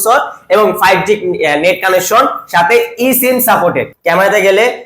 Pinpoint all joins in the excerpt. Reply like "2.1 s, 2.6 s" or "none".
3.9 s